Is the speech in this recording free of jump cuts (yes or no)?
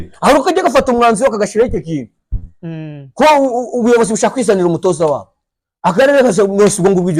yes